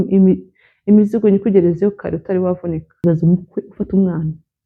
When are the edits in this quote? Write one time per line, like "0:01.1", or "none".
0:03.0

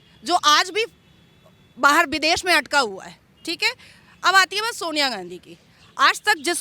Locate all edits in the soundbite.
none

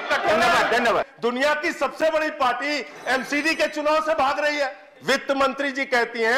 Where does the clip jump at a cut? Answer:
0:01.1
0:04.9

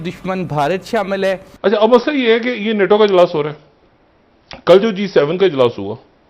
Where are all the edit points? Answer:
0:01.5

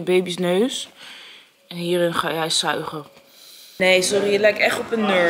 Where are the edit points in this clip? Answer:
0:03.8

